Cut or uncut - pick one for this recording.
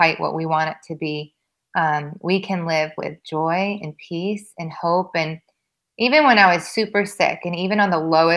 uncut